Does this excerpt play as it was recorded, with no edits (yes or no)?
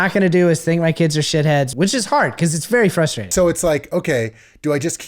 no